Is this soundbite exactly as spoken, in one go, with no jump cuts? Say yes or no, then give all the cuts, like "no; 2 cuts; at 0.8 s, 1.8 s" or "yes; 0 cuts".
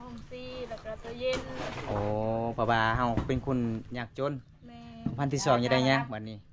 yes; 0 cuts